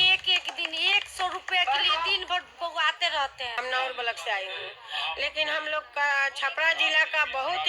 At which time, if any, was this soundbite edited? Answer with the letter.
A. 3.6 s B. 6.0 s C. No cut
A